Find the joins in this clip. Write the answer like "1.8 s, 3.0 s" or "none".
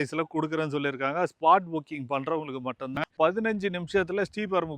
3.0 s